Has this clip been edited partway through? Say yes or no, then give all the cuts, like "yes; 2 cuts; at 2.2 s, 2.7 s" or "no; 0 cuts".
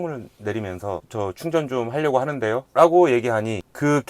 yes; 2 cuts; at 1.1 s, 2.7 s